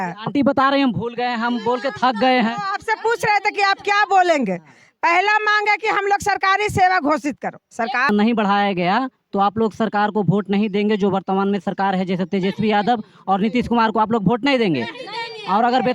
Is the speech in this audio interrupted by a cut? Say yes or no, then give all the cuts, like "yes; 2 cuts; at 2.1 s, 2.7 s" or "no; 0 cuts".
yes; 1 cut; at 8.1 s